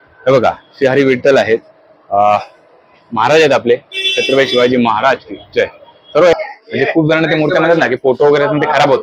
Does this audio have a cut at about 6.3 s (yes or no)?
yes